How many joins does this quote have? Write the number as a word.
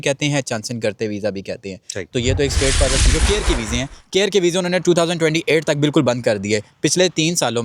one